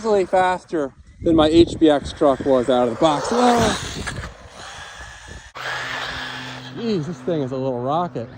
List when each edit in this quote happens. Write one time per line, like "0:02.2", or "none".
0:05.5